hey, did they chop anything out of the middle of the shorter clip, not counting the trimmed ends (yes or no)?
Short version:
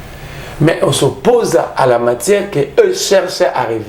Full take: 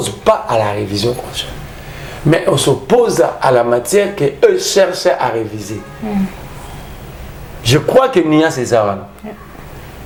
no